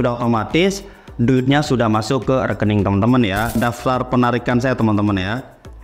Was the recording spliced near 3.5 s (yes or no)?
yes